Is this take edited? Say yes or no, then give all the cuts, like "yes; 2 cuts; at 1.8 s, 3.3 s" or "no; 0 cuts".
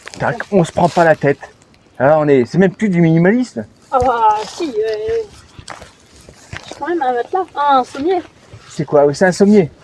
no; 0 cuts